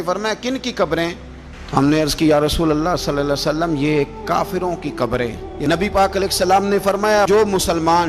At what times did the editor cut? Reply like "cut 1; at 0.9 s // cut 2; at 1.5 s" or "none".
cut 1; at 5.5 s